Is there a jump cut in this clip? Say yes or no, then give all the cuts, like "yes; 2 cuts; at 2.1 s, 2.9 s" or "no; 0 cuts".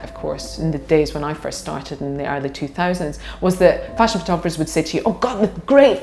yes; 1 cut; at 3.9 s